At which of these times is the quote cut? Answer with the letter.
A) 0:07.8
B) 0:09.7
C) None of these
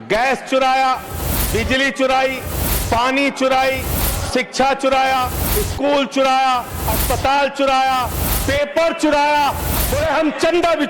B